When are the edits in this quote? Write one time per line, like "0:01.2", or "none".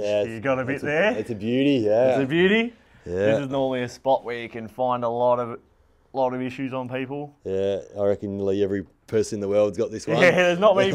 none